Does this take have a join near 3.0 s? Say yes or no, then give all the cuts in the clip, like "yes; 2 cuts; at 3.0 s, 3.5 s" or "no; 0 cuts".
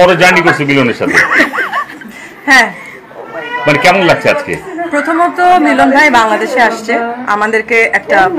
no; 0 cuts